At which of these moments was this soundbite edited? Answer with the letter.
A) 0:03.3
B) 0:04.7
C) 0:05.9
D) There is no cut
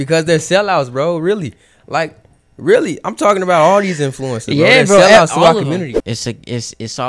C